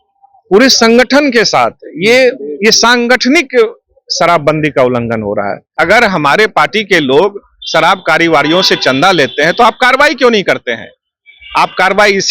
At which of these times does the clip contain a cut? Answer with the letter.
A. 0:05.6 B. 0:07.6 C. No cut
A